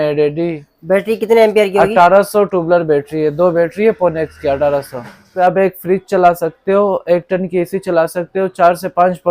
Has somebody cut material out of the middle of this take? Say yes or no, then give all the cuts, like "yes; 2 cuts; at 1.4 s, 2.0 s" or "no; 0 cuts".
yes; 1 cut; at 5.2 s